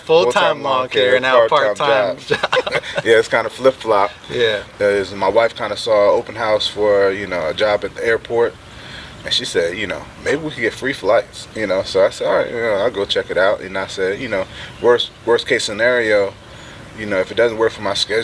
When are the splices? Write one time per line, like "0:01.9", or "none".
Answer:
none